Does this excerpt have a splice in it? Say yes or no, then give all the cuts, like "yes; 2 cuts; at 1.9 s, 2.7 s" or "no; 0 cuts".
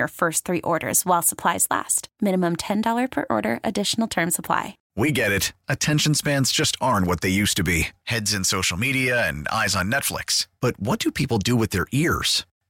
yes; 1 cut; at 4.8 s